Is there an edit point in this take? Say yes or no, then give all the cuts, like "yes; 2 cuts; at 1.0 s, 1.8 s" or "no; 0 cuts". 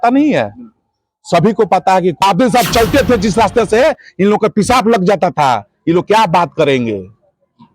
yes; 1 cut; at 2.2 s